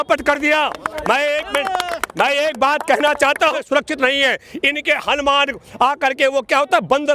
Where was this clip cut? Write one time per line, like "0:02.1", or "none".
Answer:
0:03.5